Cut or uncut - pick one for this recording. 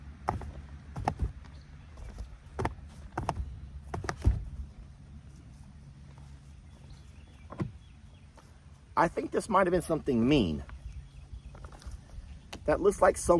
uncut